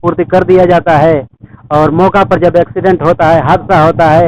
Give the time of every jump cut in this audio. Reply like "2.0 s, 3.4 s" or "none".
none